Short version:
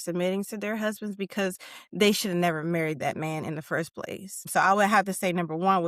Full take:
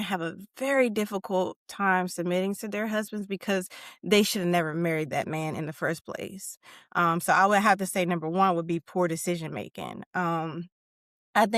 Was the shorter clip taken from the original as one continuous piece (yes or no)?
no